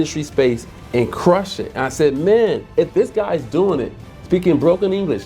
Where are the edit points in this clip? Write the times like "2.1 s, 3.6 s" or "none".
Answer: none